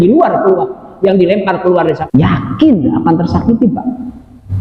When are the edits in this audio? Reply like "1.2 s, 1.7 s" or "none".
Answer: 2.0 s